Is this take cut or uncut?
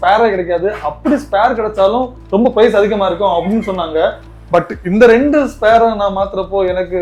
uncut